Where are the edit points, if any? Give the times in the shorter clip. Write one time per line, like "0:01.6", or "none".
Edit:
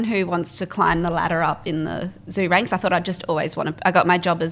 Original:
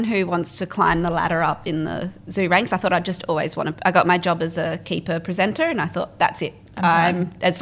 none